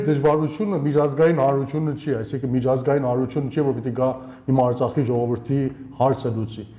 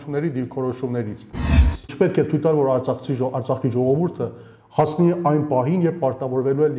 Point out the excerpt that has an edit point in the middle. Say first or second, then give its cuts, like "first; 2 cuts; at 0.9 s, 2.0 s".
second; 1 cut; at 1.6 s